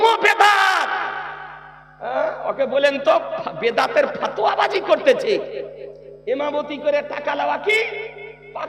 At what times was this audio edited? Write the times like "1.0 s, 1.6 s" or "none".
none